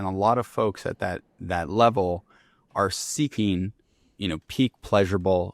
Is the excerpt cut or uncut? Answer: uncut